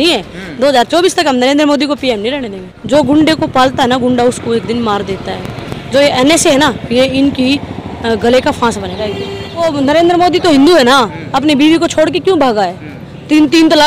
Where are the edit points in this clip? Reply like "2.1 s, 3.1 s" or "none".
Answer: 2.7 s, 9.6 s